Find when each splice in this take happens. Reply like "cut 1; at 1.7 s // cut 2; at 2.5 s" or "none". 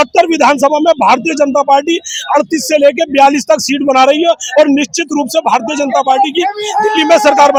none